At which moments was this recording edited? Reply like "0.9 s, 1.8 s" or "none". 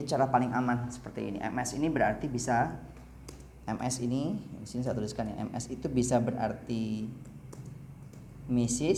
none